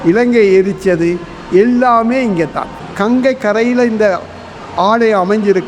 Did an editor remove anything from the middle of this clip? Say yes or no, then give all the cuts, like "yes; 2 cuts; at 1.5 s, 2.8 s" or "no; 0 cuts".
yes; 1 cut; at 2.8 s